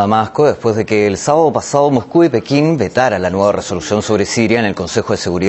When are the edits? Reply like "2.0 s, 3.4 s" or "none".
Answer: none